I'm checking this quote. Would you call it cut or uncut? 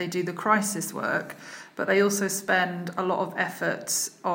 uncut